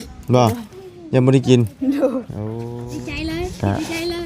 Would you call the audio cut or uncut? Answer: cut